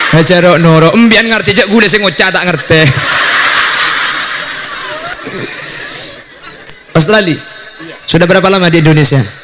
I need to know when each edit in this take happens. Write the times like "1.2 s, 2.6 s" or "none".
5.1 s